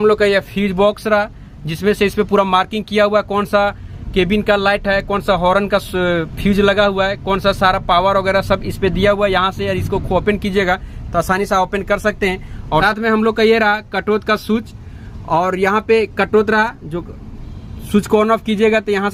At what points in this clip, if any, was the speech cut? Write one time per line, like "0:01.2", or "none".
none